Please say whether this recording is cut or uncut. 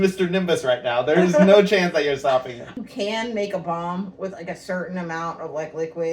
cut